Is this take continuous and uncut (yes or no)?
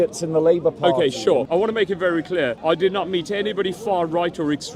no